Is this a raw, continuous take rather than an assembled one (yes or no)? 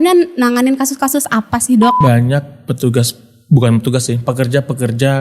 no